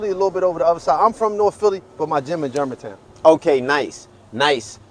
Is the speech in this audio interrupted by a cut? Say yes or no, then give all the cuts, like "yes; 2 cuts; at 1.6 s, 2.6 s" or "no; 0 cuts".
no; 0 cuts